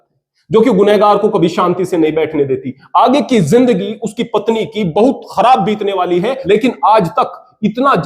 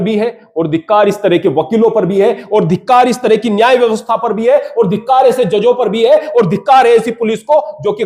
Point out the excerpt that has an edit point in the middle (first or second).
first